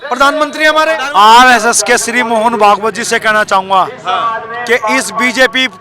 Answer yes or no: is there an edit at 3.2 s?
no